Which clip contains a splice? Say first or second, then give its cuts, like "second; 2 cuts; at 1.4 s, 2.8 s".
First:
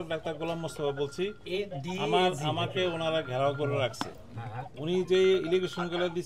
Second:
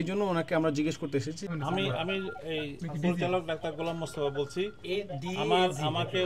second; 1 cut; at 1.5 s